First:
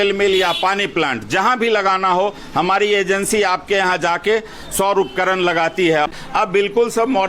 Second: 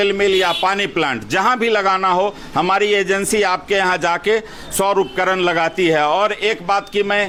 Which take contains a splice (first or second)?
first